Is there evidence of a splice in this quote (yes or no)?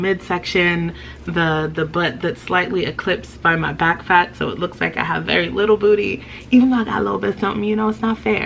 no